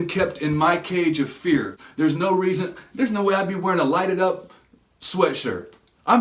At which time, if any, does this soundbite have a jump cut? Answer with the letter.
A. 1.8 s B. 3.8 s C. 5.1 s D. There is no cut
A